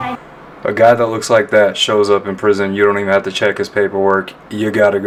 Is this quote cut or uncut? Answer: uncut